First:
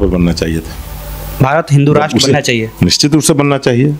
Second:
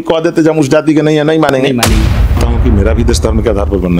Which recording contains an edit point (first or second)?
second